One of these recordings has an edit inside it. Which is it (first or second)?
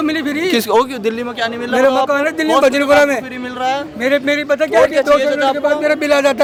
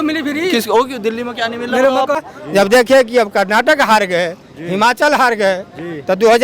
second